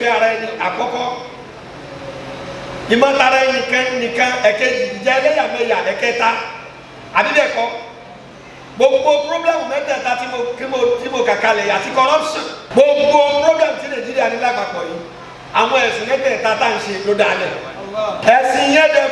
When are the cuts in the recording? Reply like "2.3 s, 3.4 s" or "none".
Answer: 12.5 s, 18.2 s